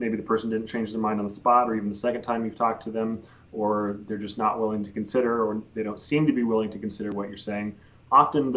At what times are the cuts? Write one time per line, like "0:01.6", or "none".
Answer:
none